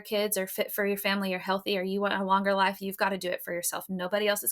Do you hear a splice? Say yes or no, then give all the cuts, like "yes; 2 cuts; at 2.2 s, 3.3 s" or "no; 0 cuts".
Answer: no; 0 cuts